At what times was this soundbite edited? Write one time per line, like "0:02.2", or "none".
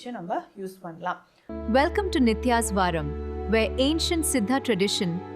0:01.3